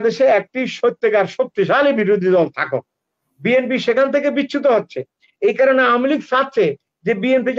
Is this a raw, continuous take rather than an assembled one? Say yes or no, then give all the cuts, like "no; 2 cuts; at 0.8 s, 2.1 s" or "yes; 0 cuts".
yes; 0 cuts